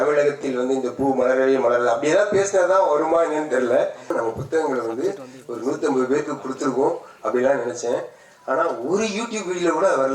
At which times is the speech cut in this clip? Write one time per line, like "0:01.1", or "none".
0:04.1